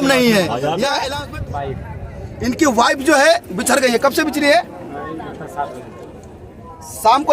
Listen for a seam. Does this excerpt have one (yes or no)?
yes